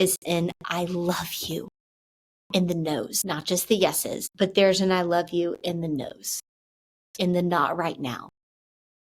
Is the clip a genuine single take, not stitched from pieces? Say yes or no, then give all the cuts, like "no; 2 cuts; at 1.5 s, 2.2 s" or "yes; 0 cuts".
no; 2 cuts; at 3.2 s, 4.2 s